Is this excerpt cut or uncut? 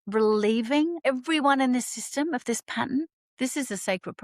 cut